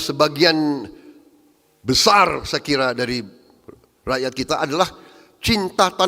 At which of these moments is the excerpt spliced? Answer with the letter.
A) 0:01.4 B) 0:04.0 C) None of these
C